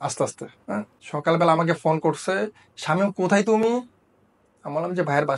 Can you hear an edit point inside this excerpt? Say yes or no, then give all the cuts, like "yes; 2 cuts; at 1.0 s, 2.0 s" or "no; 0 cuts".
yes; 1 cut; at 1.0 s